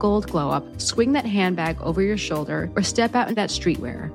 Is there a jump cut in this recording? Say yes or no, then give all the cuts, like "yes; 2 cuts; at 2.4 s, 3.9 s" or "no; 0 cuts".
no; 0 cuts